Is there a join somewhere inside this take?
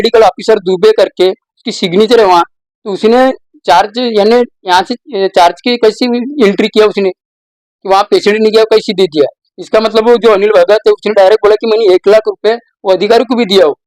no; 0 cuts

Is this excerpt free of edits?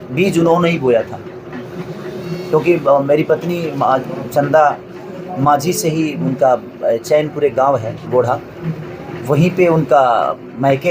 yes; 0 cuts

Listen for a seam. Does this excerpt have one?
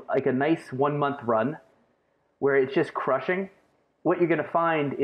no; 0 cuts

